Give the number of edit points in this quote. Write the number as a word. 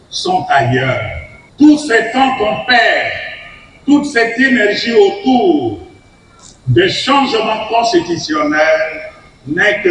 zero